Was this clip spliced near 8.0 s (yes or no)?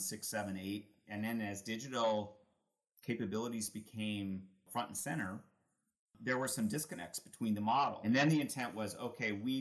yes